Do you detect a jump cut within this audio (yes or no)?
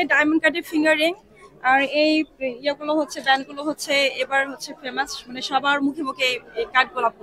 no